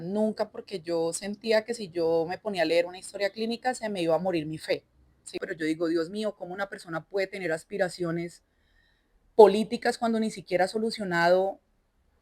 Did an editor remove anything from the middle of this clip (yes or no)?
yes